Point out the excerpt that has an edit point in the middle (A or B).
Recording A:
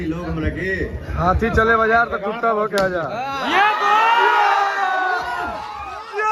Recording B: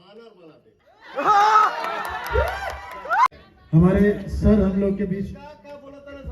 B